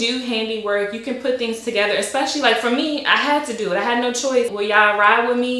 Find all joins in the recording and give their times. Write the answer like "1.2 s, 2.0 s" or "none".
4.5 s